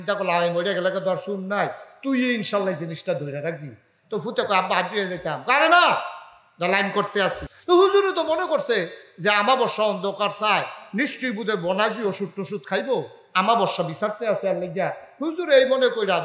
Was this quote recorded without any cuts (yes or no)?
no